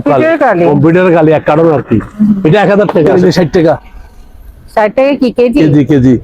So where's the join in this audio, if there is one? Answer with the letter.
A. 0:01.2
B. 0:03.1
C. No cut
B